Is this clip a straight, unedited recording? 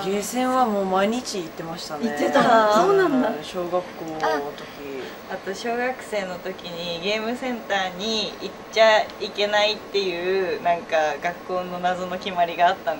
no; 1 cut; at 5.3 s

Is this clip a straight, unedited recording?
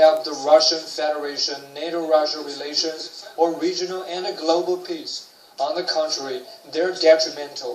no; 1 cut; at 1.5 s

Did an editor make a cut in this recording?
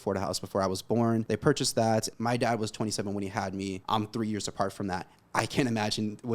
yes; 3 cuts; at 1.3 s, 2.1 s, 3.8 s

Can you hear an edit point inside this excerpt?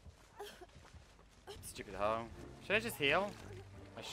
yes; 1 cut; at 1.6 s

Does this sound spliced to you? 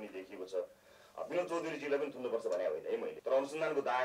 yes; 1 cut; at 3.1 s

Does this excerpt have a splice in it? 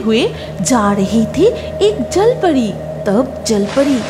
no; 0 cuts

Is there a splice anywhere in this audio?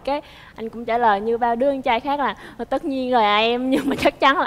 no; 0 cuts

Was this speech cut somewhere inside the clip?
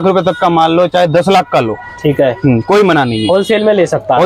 no; 0 cuts

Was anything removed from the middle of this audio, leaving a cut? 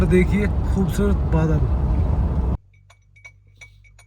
yes; 1 cut; at 2.6 s

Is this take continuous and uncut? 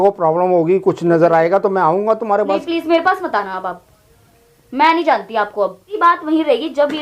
no; 1 cut; at 6.0 s

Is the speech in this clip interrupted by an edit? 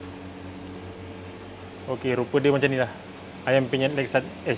no; 0 cuts

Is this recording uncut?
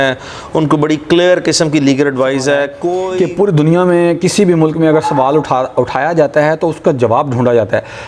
no; 1 cut; at 3.0 s

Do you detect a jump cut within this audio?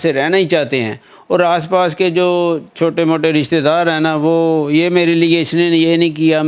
no; 0 cuts

